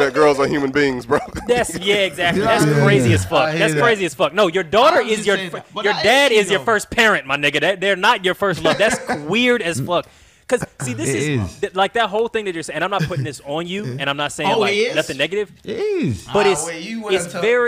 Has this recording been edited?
no; 0 cuts

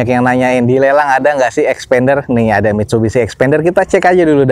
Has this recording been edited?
no; 0 cuts

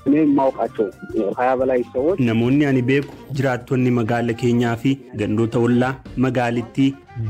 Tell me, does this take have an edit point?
yes; 1 cut; at 1.0 s

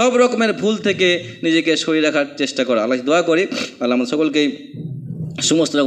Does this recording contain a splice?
no; 0 cuts

